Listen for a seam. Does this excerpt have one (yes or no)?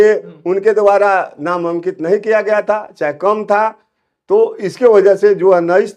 no